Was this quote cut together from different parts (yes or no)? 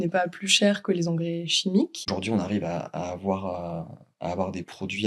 yes